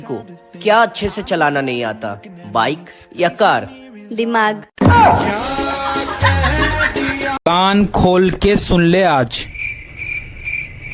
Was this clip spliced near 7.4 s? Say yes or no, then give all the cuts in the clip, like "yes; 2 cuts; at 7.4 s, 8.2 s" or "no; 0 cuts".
yes; 1 cut; at 7.4 s